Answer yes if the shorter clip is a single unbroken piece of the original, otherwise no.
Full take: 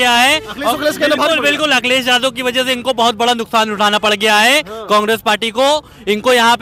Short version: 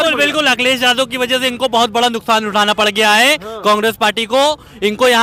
yes